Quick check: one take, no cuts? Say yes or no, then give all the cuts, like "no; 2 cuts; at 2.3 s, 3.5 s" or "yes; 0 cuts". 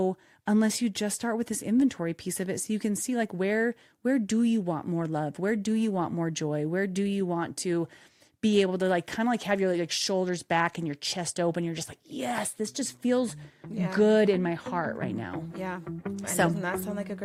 yes; 0 cuts